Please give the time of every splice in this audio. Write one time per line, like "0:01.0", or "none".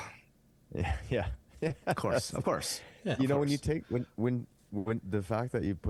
none